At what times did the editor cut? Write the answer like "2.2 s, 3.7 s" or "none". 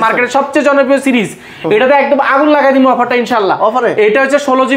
none